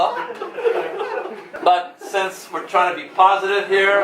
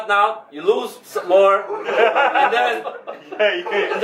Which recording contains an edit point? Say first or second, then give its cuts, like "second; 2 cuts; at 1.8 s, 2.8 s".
first; 1 cut; at 1.5 s